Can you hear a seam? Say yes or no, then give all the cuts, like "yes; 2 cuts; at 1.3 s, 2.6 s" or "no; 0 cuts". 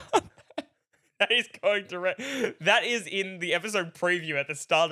no; 0 cuts